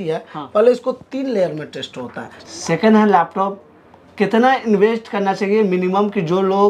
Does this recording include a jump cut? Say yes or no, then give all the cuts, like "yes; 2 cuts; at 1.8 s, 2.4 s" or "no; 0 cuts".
yes; 1 cut; at 2.3 s